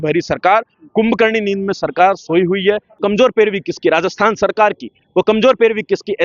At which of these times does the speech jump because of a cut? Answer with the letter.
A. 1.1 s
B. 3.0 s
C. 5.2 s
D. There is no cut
B